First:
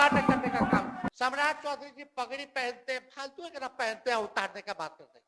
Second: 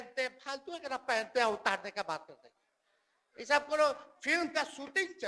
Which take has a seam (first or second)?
first